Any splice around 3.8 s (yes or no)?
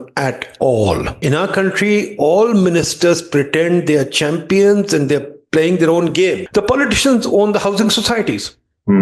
no